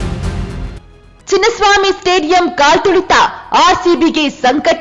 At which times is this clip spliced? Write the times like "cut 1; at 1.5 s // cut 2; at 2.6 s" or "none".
cut 1; at 0.9 s